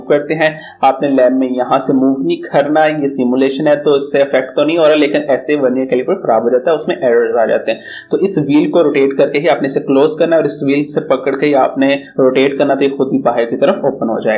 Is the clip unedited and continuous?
yes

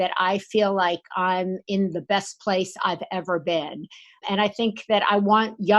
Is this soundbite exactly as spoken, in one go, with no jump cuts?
no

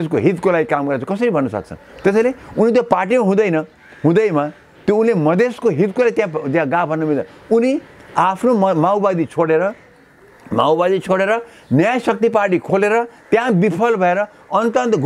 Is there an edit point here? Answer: no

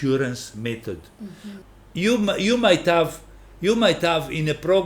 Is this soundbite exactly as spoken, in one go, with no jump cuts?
no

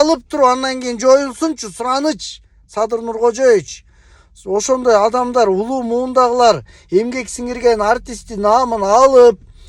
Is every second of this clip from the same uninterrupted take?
yes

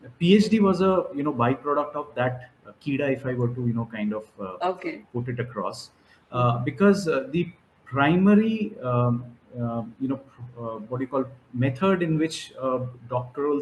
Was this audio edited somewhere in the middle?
no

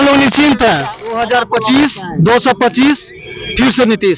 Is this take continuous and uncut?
no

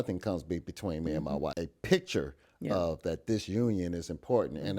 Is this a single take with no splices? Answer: no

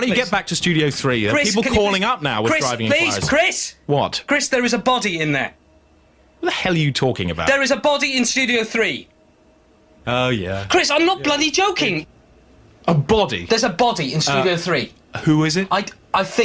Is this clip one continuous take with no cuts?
no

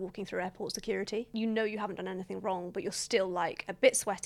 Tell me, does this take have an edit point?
no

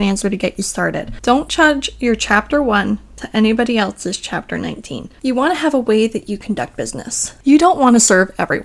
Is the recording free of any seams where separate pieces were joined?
no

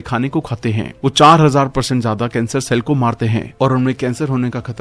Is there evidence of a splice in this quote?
no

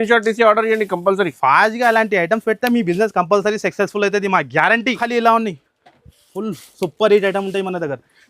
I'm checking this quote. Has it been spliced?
yes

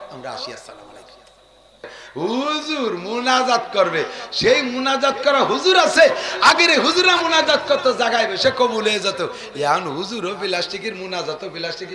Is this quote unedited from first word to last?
no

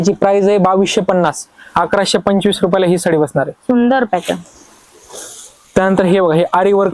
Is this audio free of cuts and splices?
yes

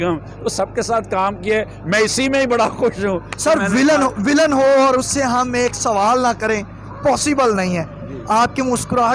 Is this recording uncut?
yes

